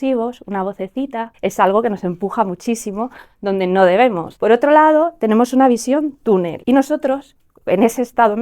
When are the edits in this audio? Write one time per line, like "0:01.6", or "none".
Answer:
0:01.2
0:04.3
0:06.6